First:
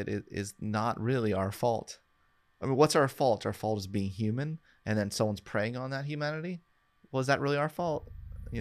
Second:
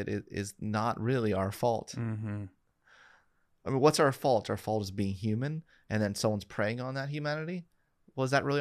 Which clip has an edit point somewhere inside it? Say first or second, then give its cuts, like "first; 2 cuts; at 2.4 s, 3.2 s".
first; 1 cut; at 1.9 s